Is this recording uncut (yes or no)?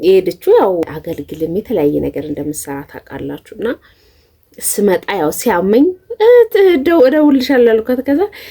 no